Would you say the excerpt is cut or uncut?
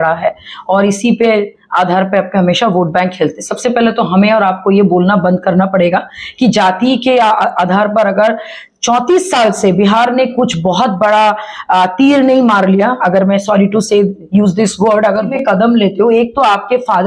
cut